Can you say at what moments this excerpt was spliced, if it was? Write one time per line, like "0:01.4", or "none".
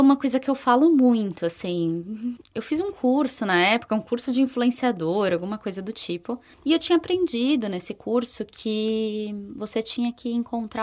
0:02.5
0:06.5